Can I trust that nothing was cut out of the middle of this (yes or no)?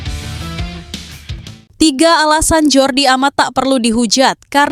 no